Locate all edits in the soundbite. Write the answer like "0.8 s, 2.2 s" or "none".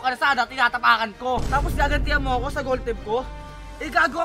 1.4 s